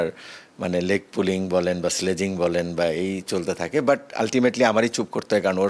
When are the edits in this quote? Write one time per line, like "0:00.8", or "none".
none